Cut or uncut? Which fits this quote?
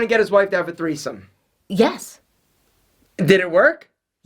uncut